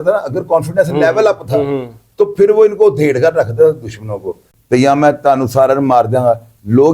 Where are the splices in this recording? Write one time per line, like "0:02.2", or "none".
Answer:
0:04.5